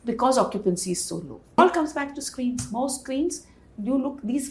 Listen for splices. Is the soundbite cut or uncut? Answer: cut